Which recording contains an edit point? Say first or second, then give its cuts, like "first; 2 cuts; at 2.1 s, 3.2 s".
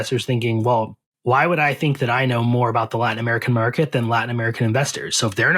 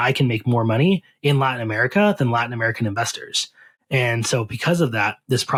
first; 1 cut; at 1.0 s